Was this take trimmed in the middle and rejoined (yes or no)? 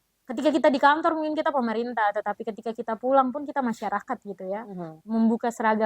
yes